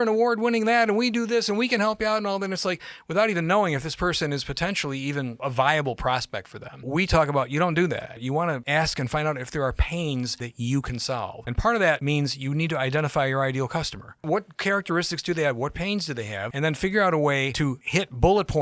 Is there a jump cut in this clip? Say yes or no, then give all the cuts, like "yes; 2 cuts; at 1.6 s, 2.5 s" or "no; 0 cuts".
yes; 9 cuts; at 5.4 s, 6.9 s, 8.3 s, 10.4 s, 11.4 s, 12.0 s, 14.2 s, 16.4 s, 17.8 s